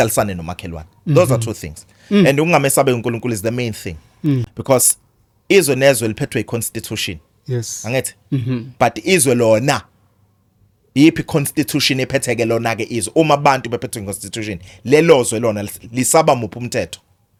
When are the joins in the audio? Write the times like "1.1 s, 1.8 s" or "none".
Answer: none